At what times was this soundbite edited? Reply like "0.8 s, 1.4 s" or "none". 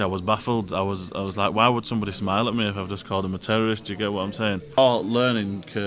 4.8 s